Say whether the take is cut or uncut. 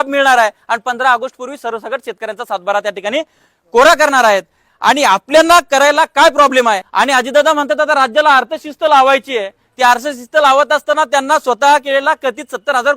cut